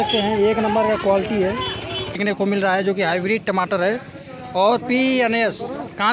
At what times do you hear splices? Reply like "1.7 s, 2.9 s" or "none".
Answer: 2.2 s